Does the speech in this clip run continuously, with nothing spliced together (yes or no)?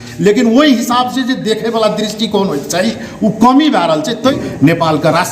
no